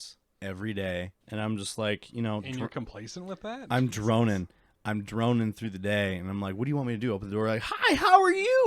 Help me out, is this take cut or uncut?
cut